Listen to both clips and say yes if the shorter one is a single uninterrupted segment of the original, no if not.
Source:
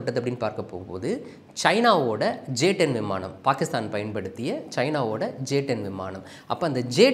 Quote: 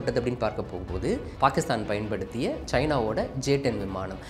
no